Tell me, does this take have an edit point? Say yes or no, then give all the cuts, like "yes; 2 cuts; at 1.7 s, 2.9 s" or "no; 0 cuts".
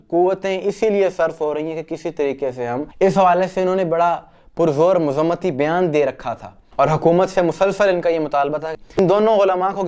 yes; 2 cuts; at 2.9 s, 8.8 s